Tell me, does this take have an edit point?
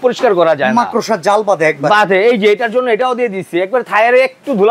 no; 0 cuts

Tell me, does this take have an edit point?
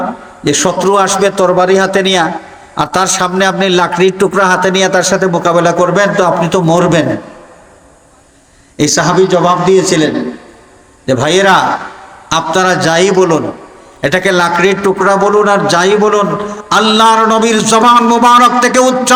no; 0 cuts

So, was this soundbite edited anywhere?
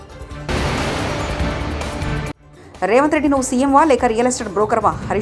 no; 0 cuts

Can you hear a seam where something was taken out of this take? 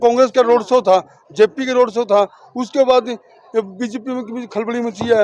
no; 0 cuts

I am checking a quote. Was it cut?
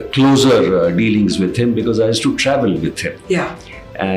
no; 0 cuts

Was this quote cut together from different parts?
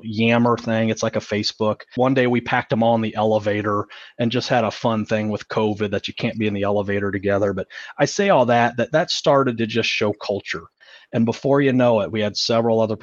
yes; 1 cut; at 1.8 s

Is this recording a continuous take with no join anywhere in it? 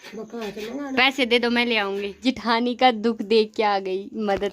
no; 1 cut; at 2.1 s

